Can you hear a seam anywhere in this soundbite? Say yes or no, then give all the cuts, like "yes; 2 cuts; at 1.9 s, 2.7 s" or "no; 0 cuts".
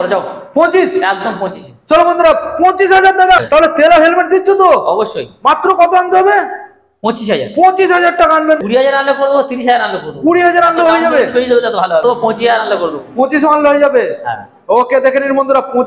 yes; 3 cuts; at 3.4 s, 8.6 s, 12.0 s